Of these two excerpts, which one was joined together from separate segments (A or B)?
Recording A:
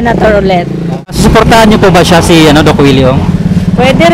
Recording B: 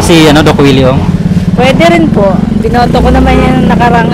A